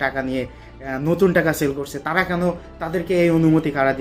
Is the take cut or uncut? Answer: uncut